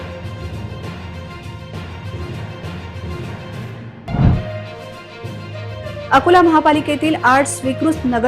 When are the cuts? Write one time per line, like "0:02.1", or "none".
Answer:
0:03.4